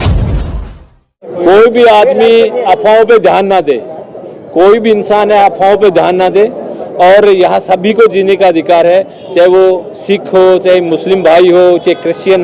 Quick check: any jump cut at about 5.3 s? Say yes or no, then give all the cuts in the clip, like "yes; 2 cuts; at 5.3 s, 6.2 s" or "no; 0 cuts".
no; 1 cut; at 1.4 s